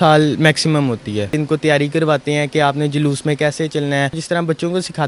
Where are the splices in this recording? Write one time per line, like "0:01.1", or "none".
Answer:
0:01.3
0:04.2